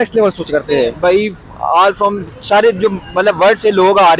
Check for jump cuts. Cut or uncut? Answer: cut